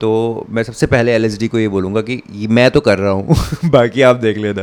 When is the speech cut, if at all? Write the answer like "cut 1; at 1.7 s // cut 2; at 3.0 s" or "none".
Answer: none